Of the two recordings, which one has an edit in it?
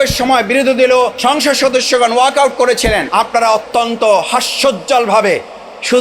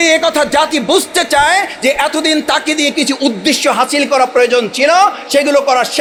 first; 2 cuts; at 1.2 s, 3.1 s

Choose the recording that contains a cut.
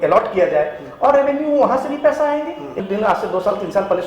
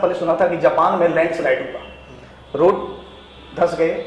first; 1 cut; at 2.8 s

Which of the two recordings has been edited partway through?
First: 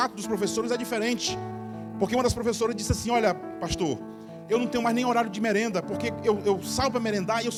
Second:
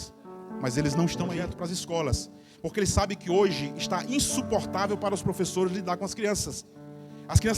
second; 1 cut; at 1.5 s

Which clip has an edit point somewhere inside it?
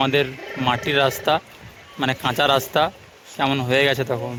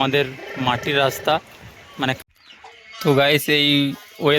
second; 1 cut; at 2.2 s

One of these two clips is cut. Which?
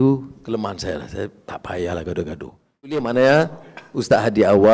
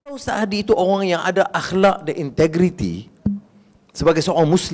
first; 1 cut; at 2.9 s

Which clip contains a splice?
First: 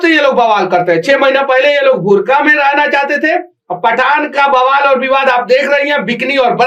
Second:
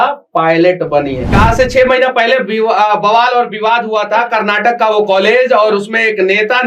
second; 1 cut; at 1.4 s

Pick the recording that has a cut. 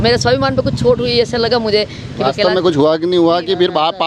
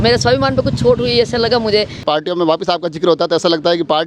second; 1 cut; at 2.0 s

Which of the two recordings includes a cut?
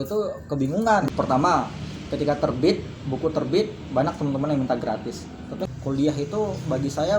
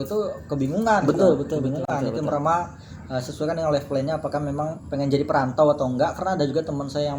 first; 2 cuts; at 1.0 s, 5.7 s

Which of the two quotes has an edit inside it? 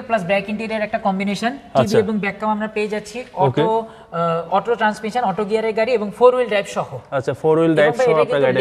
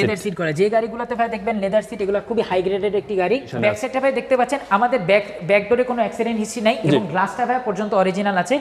second; 1 cut; at 3.5 s

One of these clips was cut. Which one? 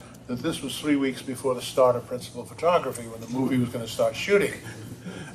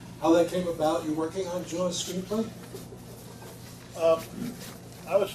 second; 1 cut; at 2.0 s

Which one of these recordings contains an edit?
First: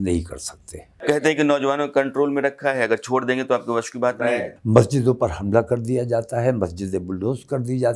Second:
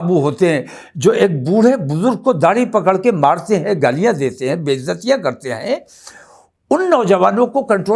first; 2 cuts; at 1.2 s, 4.2 s

